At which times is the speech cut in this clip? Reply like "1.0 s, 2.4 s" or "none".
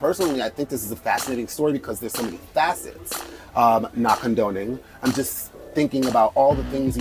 none